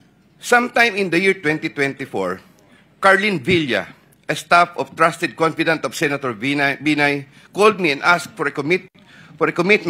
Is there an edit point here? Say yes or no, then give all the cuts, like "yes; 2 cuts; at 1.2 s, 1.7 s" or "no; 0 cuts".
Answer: no; 0 cuts